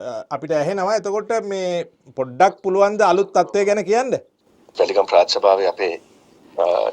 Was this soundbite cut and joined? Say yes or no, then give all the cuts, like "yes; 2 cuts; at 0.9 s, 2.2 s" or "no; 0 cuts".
yes; 1 cut; at 4.6 s